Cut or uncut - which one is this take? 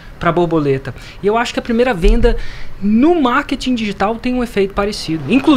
uncut